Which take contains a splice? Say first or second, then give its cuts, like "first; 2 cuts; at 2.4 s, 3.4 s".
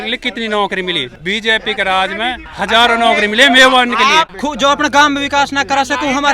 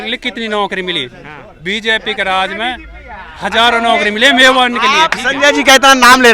first; 3 cuts; at 1.1 s, 2.5 s, 4.3 s